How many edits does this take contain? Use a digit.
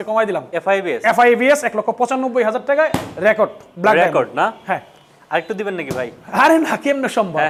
0